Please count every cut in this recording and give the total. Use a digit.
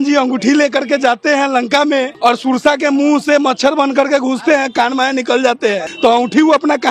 2